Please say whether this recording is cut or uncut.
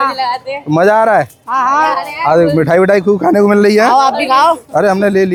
uncut